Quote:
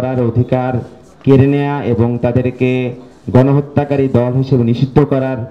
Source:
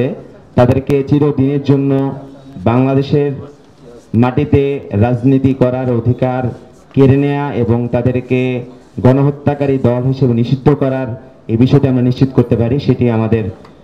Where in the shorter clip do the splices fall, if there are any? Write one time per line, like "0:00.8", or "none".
none